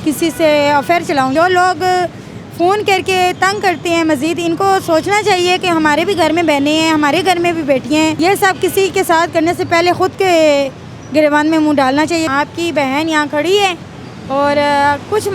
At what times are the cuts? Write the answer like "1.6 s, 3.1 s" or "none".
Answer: 1.3 s, 8.2 s, 12.3 s